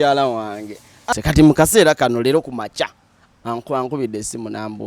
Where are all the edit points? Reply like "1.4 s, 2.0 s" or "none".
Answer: 1.1 s